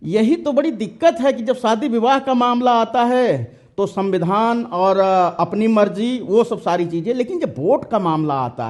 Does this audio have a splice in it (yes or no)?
no